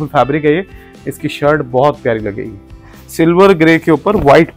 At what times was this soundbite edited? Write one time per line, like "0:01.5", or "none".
0:03.0